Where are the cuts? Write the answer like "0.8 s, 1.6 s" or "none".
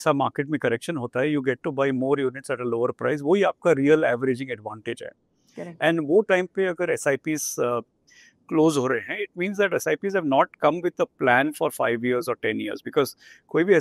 none